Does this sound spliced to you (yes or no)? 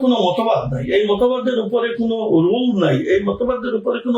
no